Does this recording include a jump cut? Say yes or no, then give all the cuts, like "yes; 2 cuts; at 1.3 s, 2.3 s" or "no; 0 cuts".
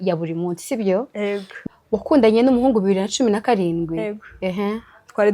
yes; 1 cut; at 1.5 s